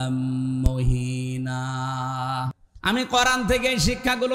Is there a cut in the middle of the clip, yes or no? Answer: yes